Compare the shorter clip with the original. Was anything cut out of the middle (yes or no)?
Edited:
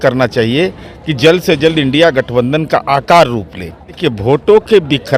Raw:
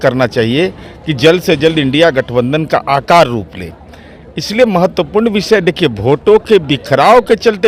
yes